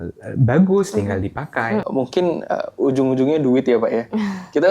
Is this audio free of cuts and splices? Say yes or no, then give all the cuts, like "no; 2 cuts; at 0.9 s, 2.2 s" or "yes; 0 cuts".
no; 1 cut; at 1.9 s